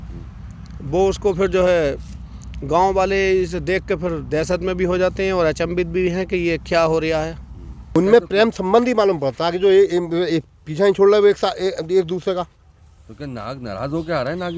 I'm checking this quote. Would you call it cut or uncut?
cut